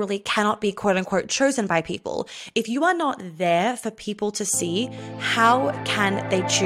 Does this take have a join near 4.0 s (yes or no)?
no